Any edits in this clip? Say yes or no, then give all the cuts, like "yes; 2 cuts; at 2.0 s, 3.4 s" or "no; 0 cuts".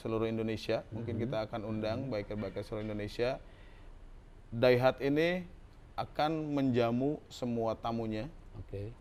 no; 0 cuts